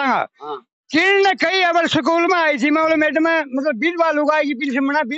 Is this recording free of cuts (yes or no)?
yes